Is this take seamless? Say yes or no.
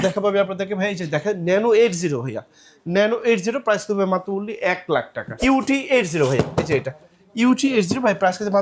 no